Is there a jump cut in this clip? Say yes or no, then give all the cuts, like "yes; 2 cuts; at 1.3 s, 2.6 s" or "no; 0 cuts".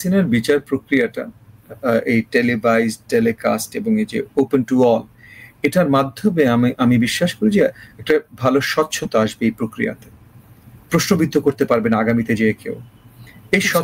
no; 0 cuts